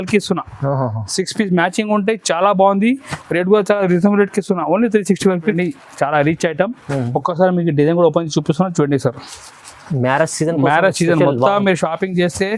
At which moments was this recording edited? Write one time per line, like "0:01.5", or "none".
0:05.5